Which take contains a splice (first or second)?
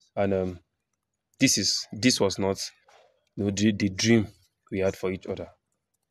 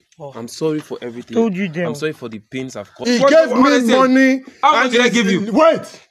second